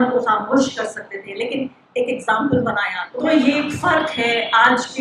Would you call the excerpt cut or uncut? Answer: cut